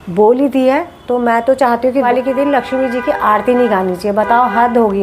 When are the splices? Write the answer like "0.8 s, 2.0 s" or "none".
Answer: 2.0 s